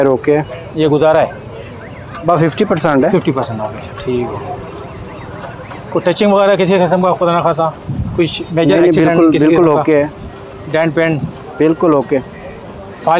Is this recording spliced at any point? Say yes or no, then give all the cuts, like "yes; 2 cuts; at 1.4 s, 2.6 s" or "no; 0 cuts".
no; 0 cuts